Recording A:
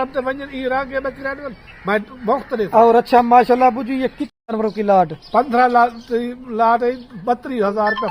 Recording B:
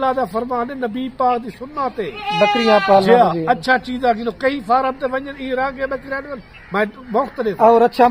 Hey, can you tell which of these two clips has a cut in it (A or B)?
A